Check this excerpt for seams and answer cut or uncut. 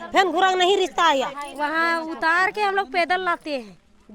cut